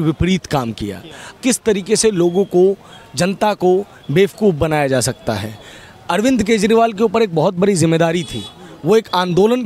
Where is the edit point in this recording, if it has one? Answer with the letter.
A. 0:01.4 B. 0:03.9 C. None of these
A